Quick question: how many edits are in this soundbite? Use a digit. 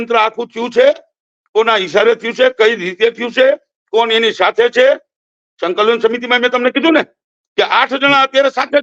0